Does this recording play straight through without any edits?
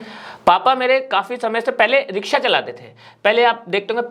yes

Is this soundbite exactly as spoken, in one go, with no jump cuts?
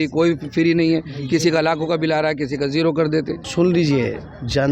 no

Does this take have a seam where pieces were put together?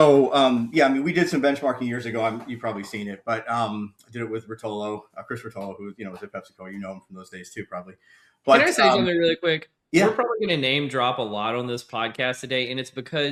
no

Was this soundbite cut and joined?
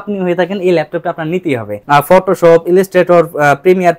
yes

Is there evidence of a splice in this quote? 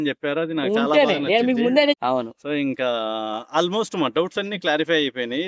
yes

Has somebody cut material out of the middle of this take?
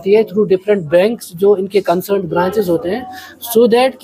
no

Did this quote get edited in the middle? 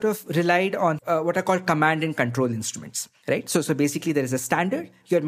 yes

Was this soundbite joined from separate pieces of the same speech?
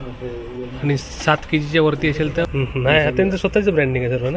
yes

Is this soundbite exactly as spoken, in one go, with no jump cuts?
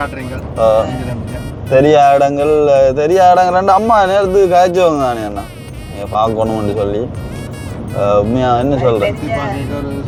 yes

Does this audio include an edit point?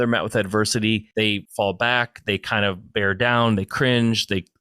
yes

